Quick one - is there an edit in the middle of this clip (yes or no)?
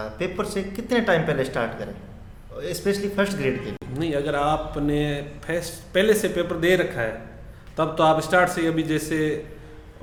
no